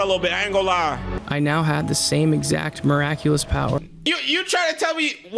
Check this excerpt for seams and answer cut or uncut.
cut